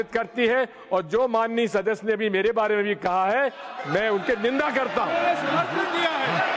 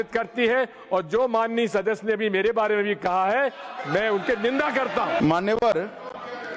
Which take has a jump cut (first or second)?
second